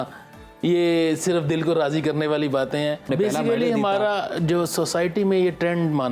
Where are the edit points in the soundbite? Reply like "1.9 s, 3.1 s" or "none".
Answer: 3.1 s